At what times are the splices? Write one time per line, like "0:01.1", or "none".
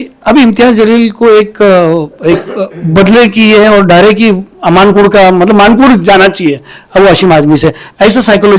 none